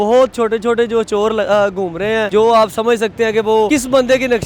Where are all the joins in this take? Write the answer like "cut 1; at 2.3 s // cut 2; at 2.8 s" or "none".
cut 1; at 2.3 s // cut 2; at 3.7 s

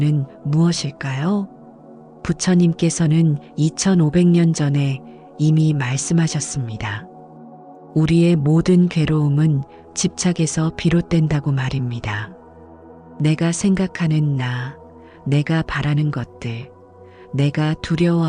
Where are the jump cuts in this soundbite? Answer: none

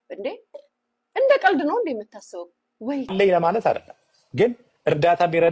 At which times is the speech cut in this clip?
cut 1; at 3.1 s

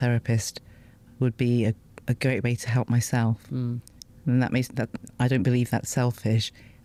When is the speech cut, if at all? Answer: none

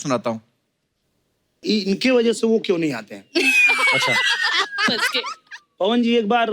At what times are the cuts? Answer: none

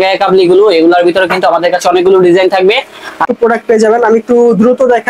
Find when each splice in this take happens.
cut 1; at 3.2 s

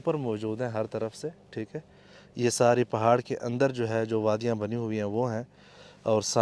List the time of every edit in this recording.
none

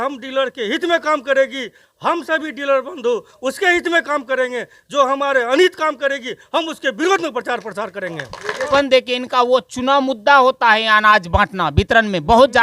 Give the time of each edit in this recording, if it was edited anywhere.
cut 1; at 8.7 s

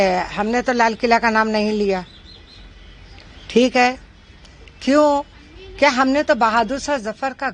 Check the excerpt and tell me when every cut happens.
none

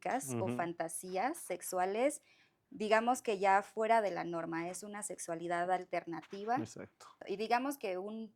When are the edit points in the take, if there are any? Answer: cut 1; at 7.2 s

